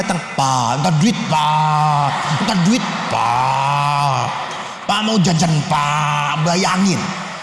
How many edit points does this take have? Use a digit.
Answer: 0